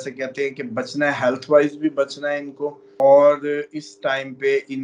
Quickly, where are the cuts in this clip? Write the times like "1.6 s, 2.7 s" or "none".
2.8 s